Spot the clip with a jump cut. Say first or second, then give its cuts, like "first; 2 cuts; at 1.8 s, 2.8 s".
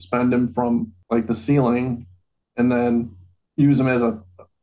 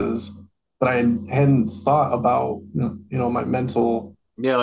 first; 1 cut; at 1.0 s